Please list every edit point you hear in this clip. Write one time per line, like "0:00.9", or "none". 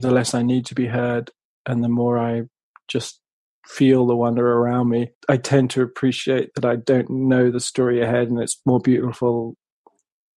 0:05.1